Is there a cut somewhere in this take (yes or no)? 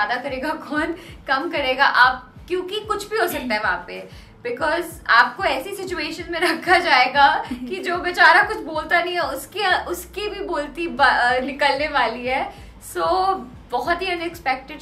no